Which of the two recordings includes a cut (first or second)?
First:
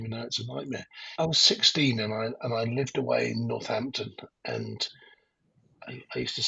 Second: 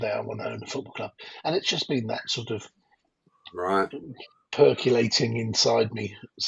first